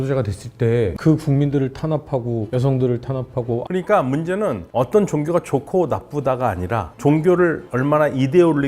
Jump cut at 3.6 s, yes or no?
yes